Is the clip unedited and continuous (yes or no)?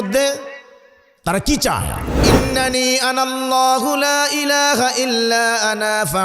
no